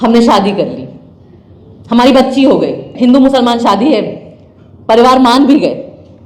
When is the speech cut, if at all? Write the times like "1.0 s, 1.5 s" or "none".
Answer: 2.9 s

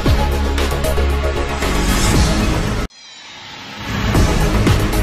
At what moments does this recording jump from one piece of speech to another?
none

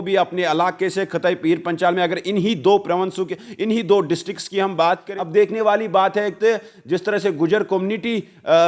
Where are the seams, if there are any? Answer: 5.1 s

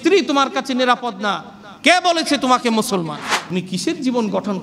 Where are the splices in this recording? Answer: 3.3 s

